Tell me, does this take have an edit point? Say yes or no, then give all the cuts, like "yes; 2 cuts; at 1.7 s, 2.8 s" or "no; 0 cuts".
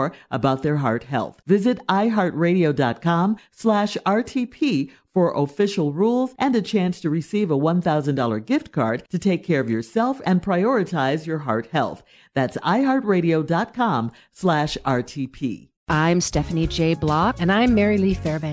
yes; 1 cut; at 15.7 s